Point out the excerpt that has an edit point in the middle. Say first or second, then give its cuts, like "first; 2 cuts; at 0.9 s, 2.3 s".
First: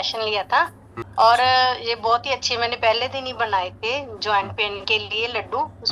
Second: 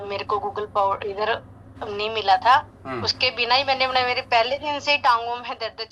first; 1 cut; at 1.0 s